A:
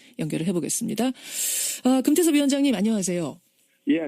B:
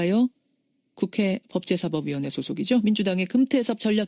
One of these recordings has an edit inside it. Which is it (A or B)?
A